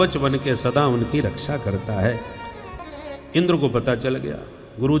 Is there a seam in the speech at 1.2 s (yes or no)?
no